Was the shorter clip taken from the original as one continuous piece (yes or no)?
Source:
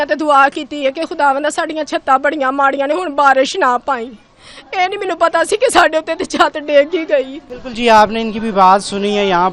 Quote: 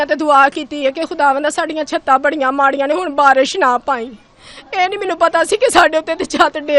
yes